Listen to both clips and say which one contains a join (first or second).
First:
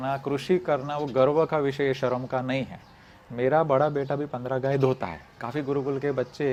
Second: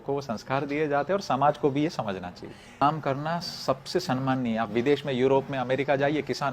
second